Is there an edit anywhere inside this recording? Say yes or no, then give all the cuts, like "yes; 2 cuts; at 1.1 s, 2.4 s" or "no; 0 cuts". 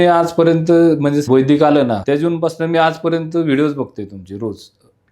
yes; 1 cut; at 2.0 s